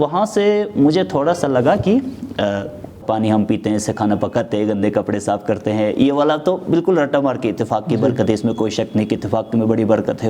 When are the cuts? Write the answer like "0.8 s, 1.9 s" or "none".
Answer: 3.0 s